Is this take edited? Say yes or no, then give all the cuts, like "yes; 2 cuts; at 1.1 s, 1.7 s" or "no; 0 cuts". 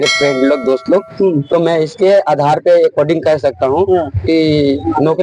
no; 0 cuts